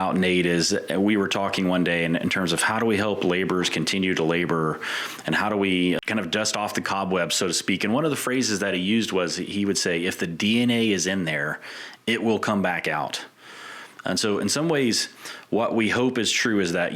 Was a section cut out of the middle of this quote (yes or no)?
yes